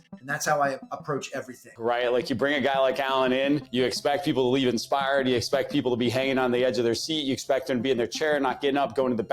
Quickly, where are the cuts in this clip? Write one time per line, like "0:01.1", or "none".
0:01.7
0:03.7